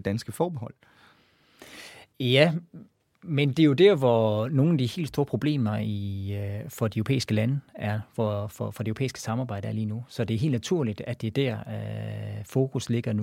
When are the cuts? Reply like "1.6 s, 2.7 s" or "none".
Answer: 2.1 s